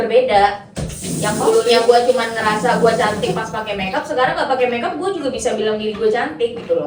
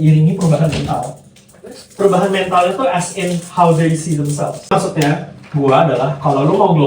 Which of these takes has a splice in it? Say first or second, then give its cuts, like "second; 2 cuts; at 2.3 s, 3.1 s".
second; 1 cut; at 4.7 s